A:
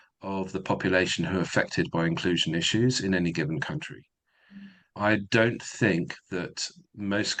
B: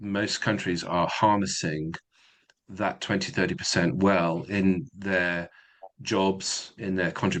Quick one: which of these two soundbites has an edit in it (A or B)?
A